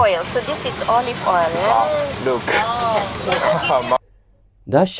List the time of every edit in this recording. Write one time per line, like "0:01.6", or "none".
none